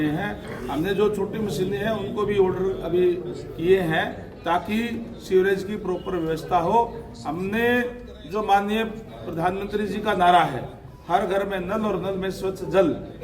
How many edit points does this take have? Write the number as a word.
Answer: zero